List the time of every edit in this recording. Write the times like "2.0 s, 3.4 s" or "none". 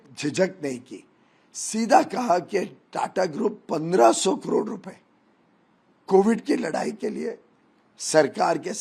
none